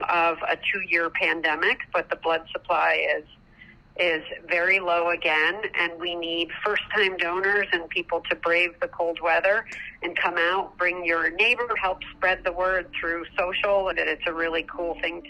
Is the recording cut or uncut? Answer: cut